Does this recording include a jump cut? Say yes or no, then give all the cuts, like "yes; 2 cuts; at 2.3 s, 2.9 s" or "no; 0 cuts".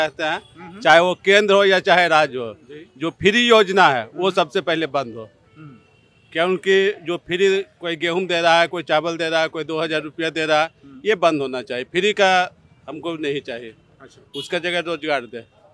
no; 0 cuts